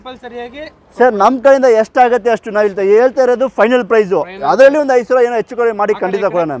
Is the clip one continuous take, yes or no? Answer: yes